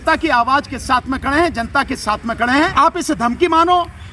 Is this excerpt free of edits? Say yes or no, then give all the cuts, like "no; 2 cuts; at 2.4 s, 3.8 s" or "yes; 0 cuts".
no; 1 cut; at 2.7 s